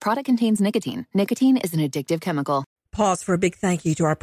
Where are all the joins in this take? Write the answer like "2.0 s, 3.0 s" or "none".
2.8 s